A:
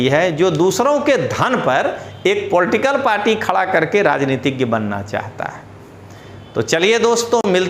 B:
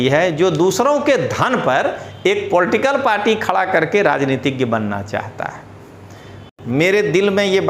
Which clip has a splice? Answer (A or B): B